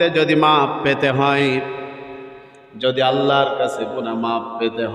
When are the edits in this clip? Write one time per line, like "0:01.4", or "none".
none